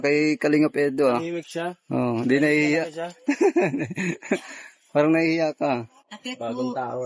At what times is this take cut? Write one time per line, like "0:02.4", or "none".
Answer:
0:05.1